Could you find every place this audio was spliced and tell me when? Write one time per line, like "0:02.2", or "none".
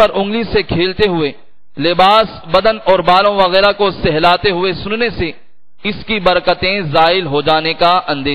none